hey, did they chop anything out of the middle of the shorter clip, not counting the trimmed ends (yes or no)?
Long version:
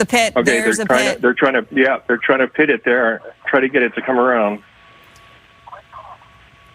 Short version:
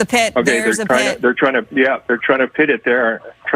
no